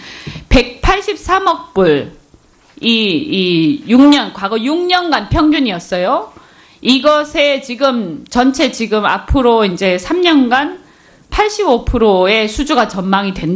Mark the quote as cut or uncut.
cut